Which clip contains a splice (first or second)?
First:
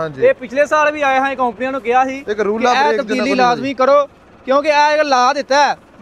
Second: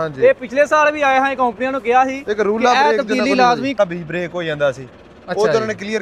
second